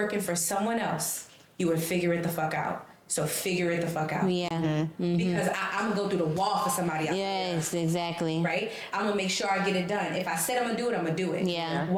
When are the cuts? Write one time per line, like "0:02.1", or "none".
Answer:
none